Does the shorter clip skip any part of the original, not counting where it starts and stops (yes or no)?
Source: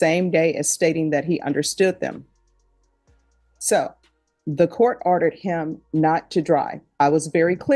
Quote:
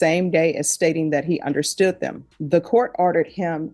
yes